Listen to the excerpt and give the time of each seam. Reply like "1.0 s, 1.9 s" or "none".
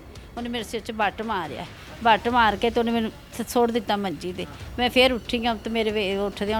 none

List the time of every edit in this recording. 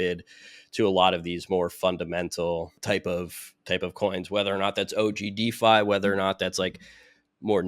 2.8 s

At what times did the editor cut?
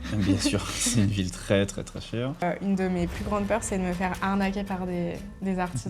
2.4 s

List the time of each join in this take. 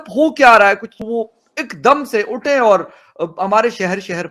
1.0 s

